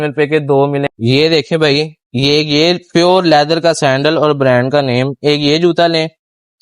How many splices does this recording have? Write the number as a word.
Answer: one